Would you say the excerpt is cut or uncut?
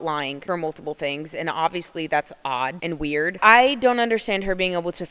cut